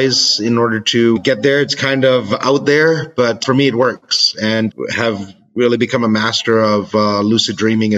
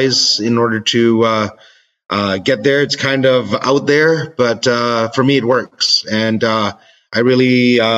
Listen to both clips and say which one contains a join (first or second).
first